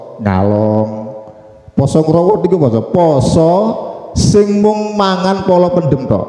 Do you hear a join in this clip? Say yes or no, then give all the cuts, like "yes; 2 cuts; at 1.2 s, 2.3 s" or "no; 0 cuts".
no; 0 cuts